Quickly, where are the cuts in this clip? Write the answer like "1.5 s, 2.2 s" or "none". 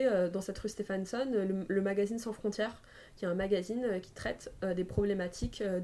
none